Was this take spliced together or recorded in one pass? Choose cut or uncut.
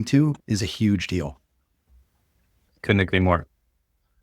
cut